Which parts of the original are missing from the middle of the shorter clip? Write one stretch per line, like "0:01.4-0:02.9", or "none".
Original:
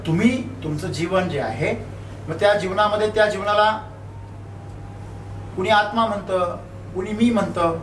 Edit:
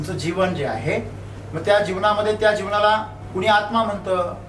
0:03.9-0:05.4